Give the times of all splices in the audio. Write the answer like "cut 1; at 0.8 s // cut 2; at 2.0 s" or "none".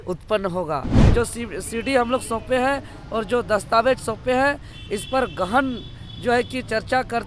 cut 1; at 1.0 s